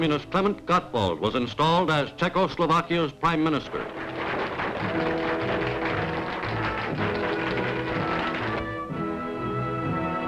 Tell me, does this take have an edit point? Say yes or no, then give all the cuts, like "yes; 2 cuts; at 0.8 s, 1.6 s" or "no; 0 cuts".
yes; 1 cut; at 1.5 s